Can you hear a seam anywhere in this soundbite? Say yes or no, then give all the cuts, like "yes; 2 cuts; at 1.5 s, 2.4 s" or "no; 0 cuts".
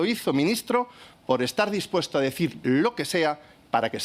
no; 0 cuts